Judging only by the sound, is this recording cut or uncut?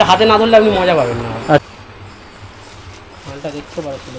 cut